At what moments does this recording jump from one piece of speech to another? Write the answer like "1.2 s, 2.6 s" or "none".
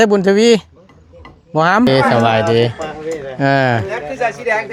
1.9 s